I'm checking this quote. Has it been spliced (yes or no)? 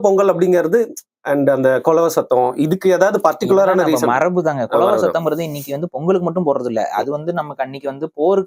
no